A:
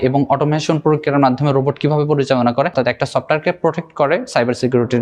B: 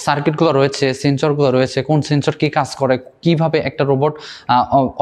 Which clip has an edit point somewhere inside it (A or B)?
A